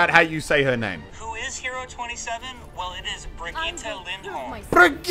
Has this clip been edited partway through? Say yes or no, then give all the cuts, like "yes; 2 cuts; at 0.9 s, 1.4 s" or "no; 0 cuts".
yes; 1 cut; at 1.1 s